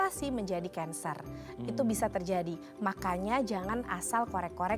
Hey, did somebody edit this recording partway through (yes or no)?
no